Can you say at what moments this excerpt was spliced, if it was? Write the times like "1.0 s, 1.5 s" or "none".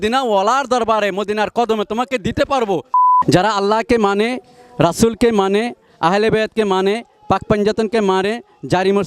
3.0 s